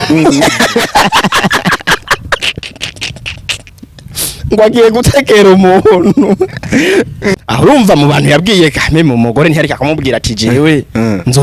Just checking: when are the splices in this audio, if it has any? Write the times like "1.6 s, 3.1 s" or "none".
7.3 s